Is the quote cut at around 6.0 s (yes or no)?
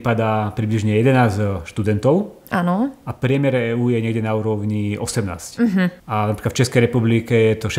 yes